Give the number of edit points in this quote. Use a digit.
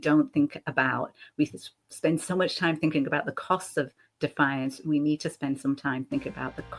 0